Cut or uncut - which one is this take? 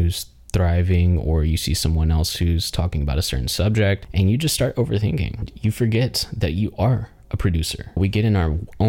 cut